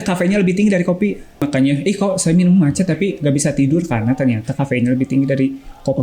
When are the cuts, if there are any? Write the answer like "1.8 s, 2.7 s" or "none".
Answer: 1.5 s